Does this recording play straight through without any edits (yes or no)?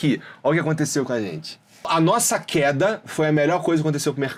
yes